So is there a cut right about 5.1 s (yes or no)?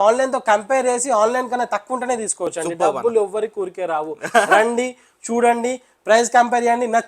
no